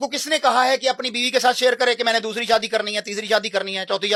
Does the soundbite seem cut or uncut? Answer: uncut